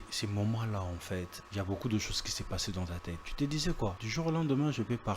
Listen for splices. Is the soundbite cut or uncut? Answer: cut